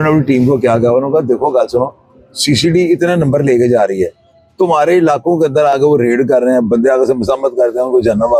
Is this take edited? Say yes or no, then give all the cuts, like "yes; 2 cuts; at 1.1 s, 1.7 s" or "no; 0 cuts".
no; 0 cuts